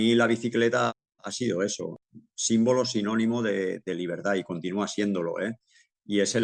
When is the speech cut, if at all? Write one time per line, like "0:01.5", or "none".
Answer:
0:00.9
0:02.0